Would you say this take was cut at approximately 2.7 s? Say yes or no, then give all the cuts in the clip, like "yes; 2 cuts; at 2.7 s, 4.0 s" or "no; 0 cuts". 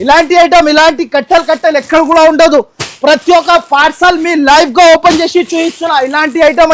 no; 0 cuts